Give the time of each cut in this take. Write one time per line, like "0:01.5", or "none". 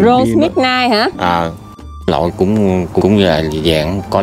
0:01.8
0:03.0